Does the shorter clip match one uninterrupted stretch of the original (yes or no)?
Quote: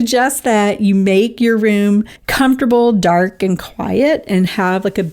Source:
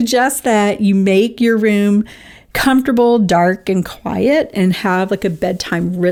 no